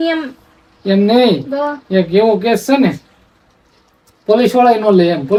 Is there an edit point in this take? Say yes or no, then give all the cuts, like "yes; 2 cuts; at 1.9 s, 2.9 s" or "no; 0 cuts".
no; 0 cuts